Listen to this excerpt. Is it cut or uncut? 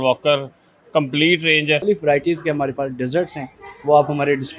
cut